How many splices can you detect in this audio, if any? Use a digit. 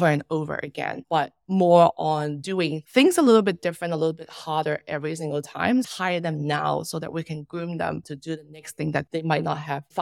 2